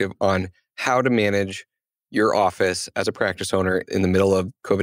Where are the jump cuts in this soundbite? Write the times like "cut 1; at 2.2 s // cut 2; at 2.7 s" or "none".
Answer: none